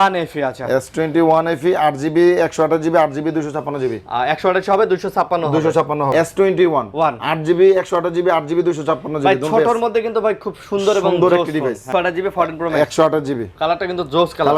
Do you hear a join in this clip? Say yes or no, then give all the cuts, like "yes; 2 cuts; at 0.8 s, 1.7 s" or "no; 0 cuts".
yes; 2 cuts; at 6.1 s, 11.9 s